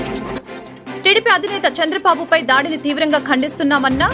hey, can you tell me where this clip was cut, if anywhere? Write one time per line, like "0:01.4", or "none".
none

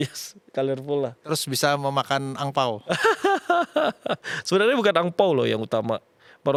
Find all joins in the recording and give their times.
none

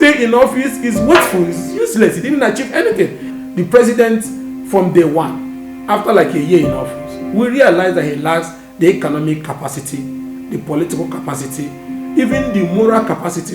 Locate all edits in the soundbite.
0:03.2

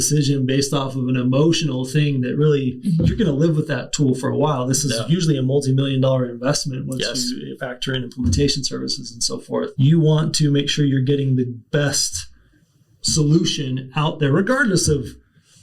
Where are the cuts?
0:02.8
0:09.7

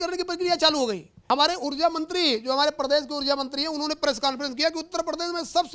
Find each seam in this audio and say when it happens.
0:01.1

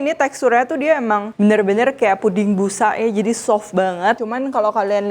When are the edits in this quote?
0:01.3
0:04.2

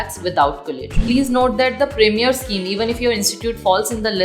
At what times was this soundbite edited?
0:01.0

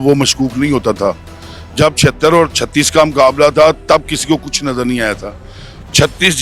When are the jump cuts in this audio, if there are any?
none

